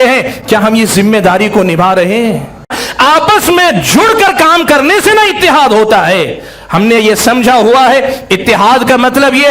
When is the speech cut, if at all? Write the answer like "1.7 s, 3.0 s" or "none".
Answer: 2.8 s